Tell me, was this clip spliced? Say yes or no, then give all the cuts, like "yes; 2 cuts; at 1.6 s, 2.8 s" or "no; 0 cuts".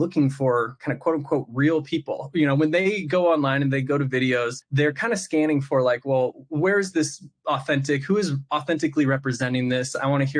yes; 1 cut; at 4.6 s